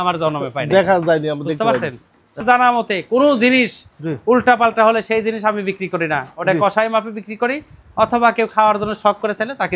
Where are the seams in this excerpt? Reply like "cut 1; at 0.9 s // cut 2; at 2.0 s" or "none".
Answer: cut 1; at 2.4 s